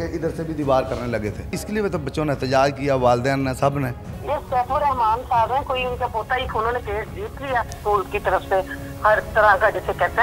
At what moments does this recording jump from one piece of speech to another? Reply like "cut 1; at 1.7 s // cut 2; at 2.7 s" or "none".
cut 1; at 1.6 s // cut 2; at 4.1 s // cut 3; at 6.5 s // cut 4; at 7.8 s